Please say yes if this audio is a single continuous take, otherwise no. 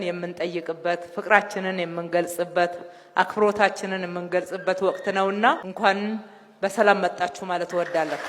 no